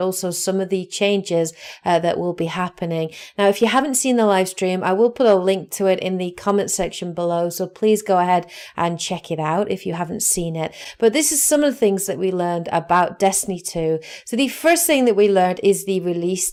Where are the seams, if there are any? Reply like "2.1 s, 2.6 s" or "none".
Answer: none